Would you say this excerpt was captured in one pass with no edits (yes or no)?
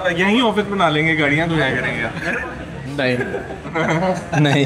yes